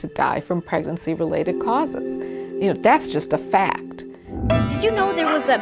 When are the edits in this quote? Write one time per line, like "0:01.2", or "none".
0:04.6